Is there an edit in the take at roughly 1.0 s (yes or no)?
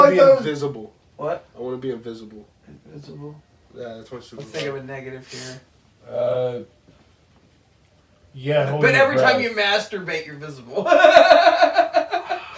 no